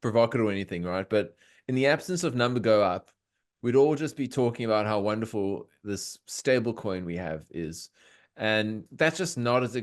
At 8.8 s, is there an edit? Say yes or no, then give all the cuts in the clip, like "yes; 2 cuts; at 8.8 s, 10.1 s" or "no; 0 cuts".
yes; 1 cut; at 8.8 s